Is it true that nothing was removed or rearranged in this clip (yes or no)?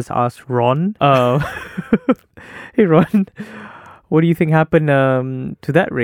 no